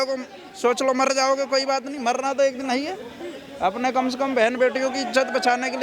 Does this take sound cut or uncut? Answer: uncut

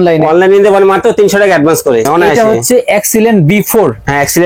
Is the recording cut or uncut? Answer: cut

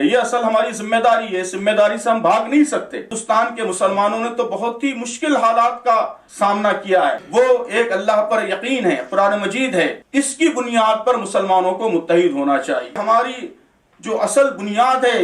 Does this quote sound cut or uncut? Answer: cut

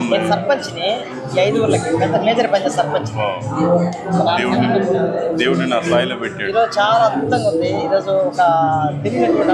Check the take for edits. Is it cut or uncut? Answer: uncut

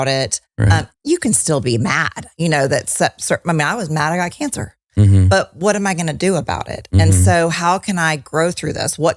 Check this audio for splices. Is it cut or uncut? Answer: uncut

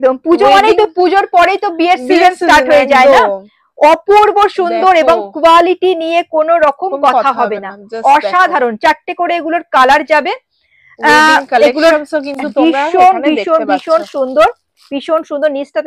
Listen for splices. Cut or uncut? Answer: uncut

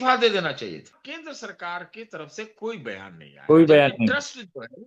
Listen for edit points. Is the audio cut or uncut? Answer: cut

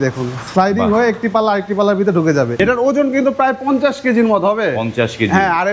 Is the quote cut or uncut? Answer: cut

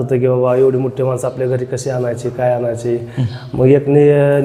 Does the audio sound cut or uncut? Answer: uncut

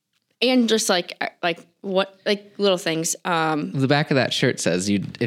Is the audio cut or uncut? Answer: uncut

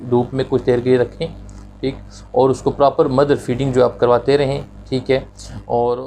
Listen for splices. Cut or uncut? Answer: uncut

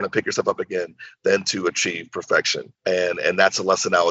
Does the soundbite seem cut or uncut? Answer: cut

